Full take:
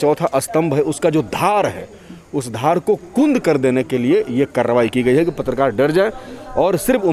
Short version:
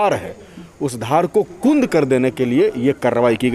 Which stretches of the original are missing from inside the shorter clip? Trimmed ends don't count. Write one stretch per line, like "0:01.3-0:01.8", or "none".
none